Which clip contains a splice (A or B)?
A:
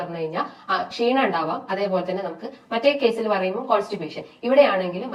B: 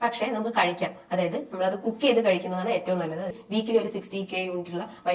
B